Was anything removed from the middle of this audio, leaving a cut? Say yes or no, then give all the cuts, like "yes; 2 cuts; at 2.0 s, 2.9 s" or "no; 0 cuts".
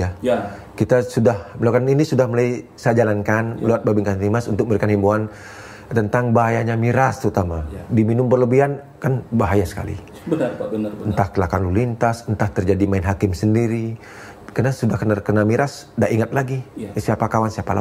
no; 0 cuts